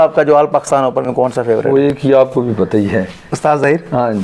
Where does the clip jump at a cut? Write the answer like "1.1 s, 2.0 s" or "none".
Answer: none

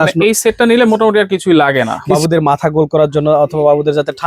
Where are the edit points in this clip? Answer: 2.0 s

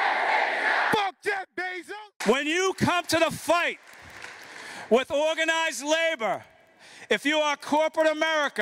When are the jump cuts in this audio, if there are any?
1.7 s

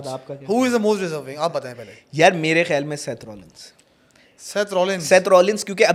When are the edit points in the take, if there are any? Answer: none

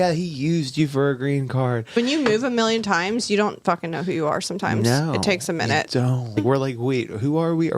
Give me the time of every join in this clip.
1.9 s, 6.4 s

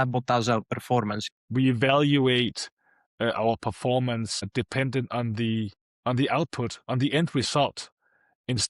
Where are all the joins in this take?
1.3 s, 4.5 s

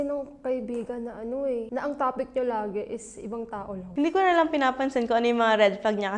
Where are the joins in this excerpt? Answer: 1.7 s, 3.8 s

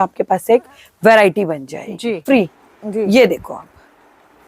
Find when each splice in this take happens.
2.2 s

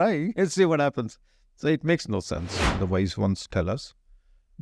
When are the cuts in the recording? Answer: 2.6 s

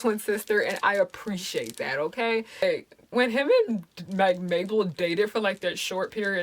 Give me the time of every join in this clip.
2.6 s

